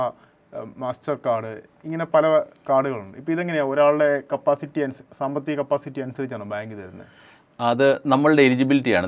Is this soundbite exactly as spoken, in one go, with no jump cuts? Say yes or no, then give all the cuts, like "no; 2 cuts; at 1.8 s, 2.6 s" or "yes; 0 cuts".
yes; 0 cuts